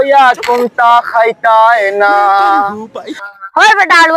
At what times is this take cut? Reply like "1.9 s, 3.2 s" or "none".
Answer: 3.2 s